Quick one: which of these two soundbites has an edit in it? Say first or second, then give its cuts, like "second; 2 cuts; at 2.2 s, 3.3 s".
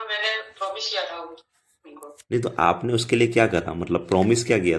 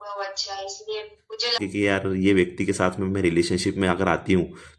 second; 1 cut; at 1.6 s